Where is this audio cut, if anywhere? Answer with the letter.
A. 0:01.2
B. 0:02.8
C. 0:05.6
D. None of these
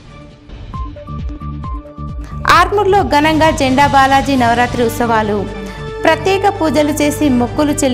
D